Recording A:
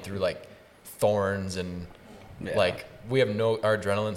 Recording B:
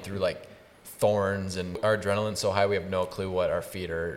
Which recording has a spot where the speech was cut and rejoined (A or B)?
B